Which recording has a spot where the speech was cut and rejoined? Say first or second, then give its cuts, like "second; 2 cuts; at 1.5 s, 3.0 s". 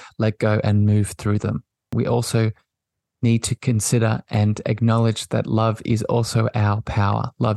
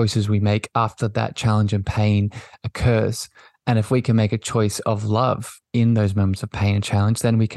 first; 1 cut; at 1.9 s